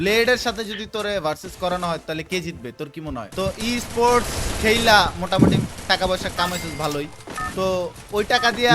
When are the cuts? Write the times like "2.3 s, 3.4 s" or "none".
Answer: 3.3 s